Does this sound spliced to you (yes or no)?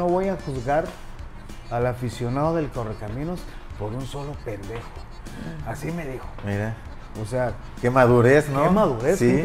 no